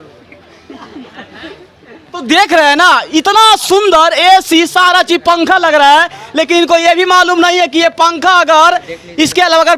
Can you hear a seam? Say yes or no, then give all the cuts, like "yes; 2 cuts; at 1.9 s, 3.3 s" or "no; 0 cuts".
no; 0 cuts